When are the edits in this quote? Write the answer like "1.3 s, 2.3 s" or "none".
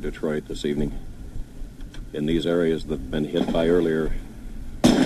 none